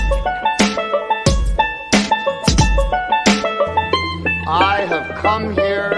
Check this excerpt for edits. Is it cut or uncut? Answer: uncut